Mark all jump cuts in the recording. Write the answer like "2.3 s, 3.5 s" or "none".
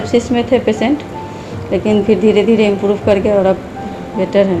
none